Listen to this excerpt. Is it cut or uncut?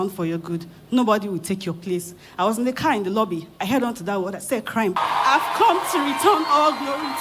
cut